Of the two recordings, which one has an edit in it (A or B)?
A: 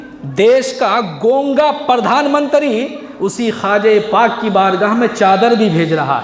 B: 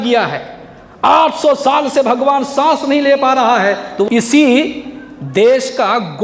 B